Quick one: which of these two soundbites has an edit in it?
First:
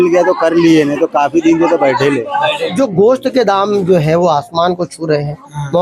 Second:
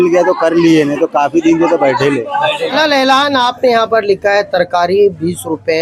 first; 1 cut; at 2.7 s

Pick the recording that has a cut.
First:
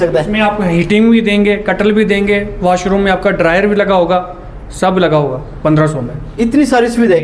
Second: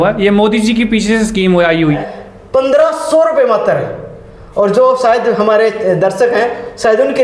second; 1 cut; at 2.0 s

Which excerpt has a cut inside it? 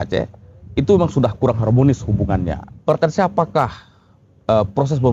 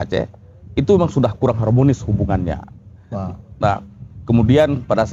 first; 1 cut; at 2.7 s

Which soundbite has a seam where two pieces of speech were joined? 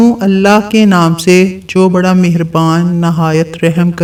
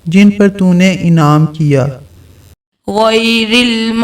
second; 1 cut; at 2.5 s

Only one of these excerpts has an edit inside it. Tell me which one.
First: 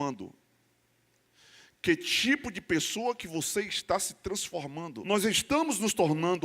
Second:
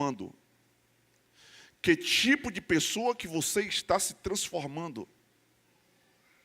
first; 1 cut; at 5.0 s

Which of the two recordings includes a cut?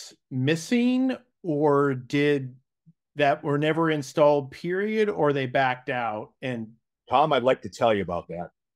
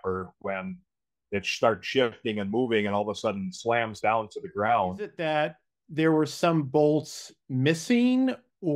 second; 1 cut; at 5.2 s

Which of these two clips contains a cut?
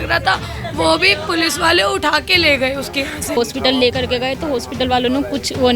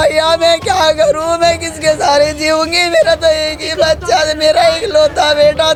first; 1 cut; at 3.4 s

